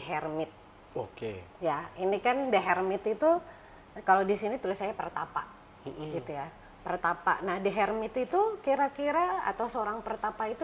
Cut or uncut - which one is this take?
uncut